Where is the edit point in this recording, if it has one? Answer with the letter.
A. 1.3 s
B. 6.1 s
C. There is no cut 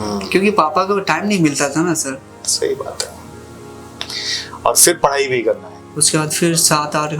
C